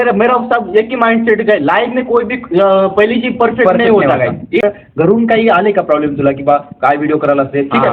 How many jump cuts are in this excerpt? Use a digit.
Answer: 1